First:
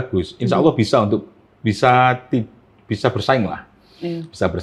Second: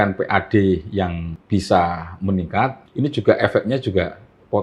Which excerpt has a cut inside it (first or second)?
second